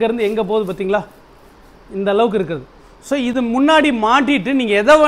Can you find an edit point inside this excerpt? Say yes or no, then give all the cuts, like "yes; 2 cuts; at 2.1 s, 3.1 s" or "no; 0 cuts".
no; 0 cuts